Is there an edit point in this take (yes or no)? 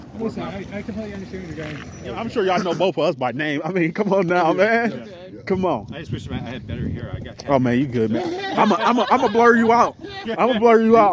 yes